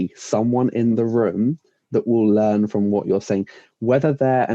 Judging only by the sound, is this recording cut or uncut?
uncut